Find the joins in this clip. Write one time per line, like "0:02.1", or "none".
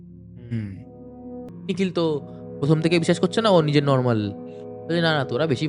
0:01.5